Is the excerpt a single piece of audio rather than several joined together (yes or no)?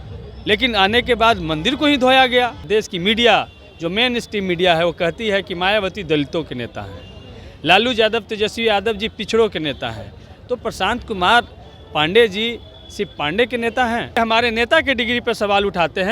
no